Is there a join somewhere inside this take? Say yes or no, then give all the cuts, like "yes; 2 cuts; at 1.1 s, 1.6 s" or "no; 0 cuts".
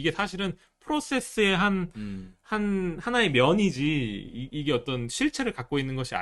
no; 0 cuts